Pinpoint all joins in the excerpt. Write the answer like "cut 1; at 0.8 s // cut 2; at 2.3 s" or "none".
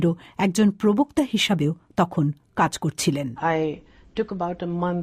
cut 1; at 3.5 s